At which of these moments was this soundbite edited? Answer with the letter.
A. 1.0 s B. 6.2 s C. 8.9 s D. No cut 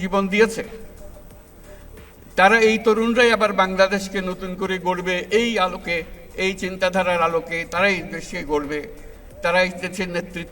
D